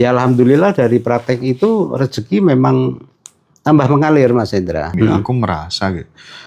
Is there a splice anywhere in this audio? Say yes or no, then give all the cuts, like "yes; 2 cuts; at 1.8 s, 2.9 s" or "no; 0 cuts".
yes; 1 cut; at 4.9 s